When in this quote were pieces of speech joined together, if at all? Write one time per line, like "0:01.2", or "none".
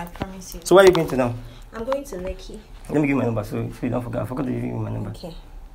none

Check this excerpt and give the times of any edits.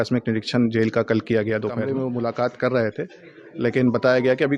0:01.8

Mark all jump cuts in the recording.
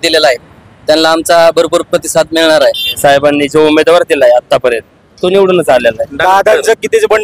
0:02.9
0:06.2

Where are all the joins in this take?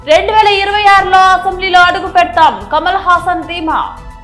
none

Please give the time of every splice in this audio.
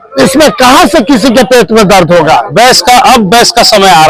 0:02.5

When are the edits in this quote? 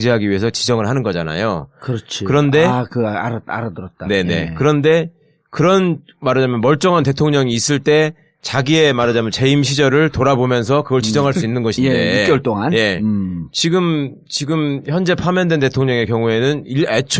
0:15.0

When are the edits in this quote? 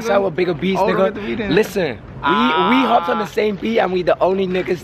none

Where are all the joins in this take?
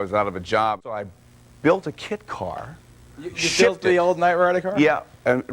0:01.2

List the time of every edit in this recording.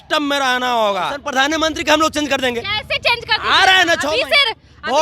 0:01.2

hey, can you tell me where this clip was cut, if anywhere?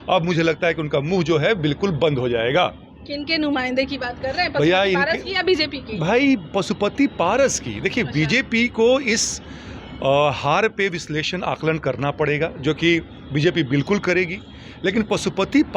none

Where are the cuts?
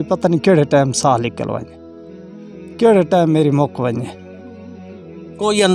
none

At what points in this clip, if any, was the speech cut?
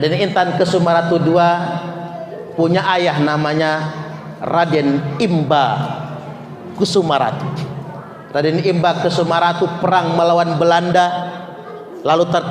none

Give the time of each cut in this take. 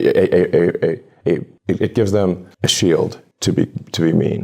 0:01.3
0:03.3

